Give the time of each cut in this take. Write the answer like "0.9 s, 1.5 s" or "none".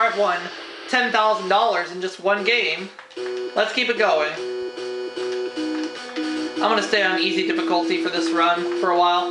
5.7 s